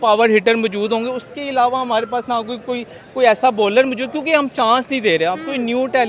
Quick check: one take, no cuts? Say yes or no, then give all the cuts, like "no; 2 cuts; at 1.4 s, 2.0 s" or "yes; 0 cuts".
yes; 0 cuts